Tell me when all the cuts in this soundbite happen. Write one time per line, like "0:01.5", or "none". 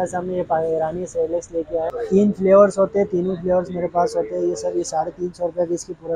0:02.0